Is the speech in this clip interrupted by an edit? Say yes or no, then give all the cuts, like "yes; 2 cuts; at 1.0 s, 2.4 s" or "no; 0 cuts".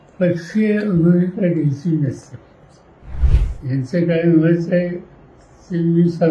yes; 1 cut; at 3.2 s